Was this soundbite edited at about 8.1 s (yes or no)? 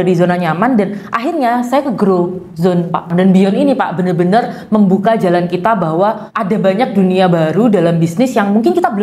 no